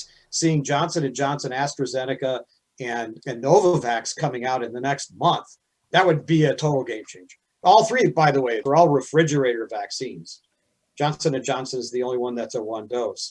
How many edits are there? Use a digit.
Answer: 2